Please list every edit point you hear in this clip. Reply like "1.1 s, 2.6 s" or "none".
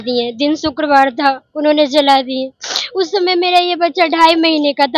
none

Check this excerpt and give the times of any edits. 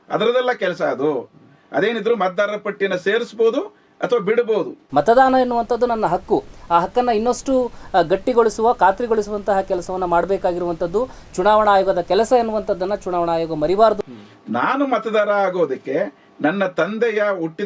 4.8 s, 14.0 s

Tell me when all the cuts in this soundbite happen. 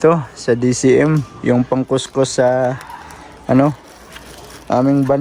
none

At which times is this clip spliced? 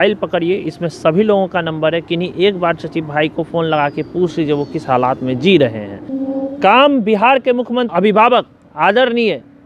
6.1 s, 7.9 s

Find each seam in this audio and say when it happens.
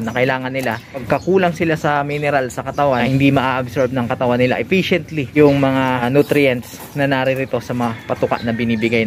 1.0 s, 3.1 s, 5.3 s, 6.0 s

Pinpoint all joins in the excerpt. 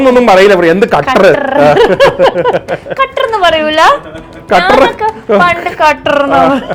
none

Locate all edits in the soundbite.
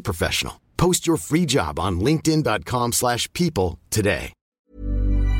4.4 s

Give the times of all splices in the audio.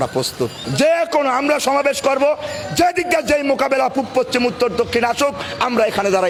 none

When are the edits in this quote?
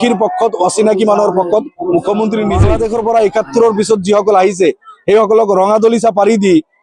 2.7 s

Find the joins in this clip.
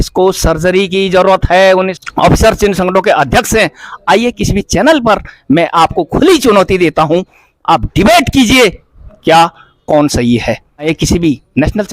2.0 s, 10.9 s

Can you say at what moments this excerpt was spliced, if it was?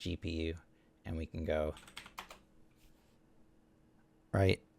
1.8 s

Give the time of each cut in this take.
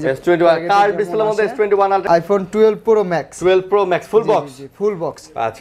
2.0 s

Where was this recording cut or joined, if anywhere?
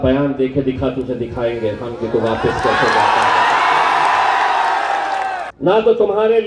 5.4 s

